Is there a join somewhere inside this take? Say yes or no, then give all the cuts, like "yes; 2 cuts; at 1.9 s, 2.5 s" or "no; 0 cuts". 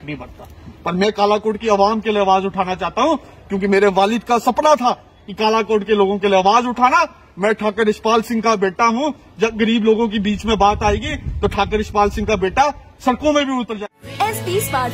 no; 0 cuts